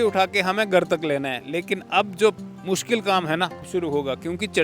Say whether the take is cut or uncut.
cut